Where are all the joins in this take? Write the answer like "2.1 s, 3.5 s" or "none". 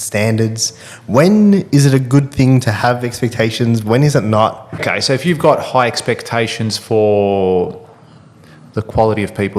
4.8 s